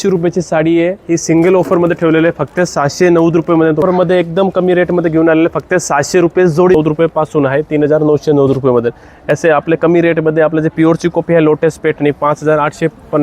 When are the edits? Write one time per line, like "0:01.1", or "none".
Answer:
0:03.8
0:06.7